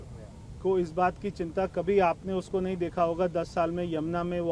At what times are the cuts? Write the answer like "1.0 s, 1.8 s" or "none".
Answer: none